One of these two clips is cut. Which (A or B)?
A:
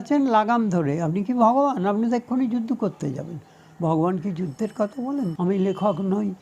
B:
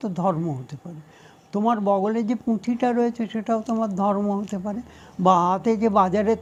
A